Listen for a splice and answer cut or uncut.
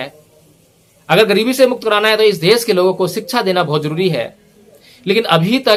uncut